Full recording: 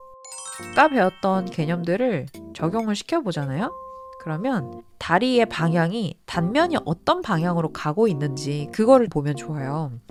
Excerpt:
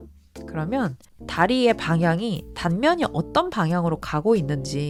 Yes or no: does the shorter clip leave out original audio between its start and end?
no